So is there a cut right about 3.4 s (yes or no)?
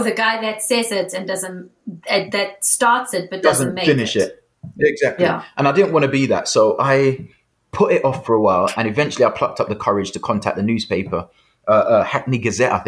yes